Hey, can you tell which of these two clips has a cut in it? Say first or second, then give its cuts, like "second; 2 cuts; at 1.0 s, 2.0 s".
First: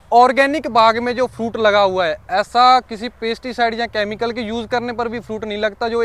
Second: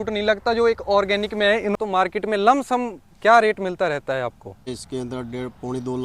second; 2 cuts; at 1.8 s, 4.7 s